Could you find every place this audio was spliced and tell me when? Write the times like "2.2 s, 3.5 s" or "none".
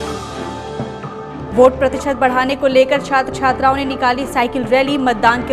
1.2 s